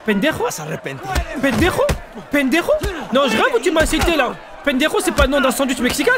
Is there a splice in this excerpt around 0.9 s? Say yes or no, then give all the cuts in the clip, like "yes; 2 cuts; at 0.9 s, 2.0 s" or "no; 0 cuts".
no; 0 cuts